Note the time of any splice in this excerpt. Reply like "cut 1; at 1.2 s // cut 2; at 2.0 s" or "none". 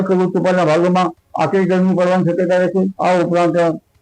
cut 1; at 2.9 s